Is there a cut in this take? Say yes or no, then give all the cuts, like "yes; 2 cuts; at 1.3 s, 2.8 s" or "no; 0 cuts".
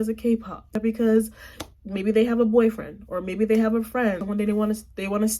yes; 2 cuts; at 0.8 s, 4.2 s